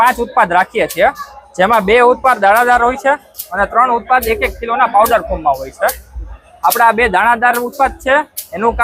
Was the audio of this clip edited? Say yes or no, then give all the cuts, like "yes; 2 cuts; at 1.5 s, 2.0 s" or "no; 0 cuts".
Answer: no; 0 cuts